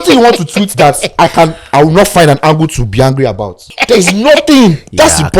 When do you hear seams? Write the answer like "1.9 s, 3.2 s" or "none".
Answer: 3.7 s